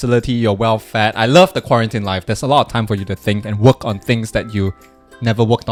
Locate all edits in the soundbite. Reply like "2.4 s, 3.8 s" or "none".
none